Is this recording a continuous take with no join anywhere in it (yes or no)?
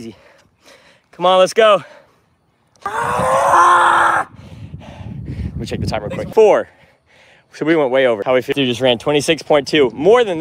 no